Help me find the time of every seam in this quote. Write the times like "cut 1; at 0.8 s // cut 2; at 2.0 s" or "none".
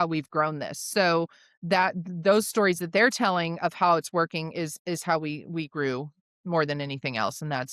none